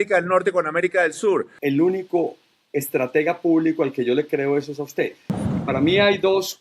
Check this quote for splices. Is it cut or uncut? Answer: cut